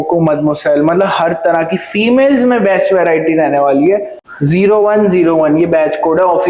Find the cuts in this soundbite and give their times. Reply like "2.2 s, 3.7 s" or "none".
4.2 s